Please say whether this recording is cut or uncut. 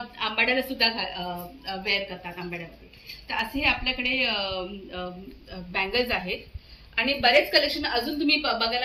uncut